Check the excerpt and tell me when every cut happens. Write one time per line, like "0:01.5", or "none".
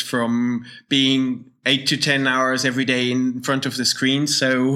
none